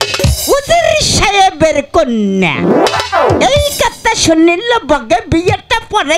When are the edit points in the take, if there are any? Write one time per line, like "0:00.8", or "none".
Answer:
none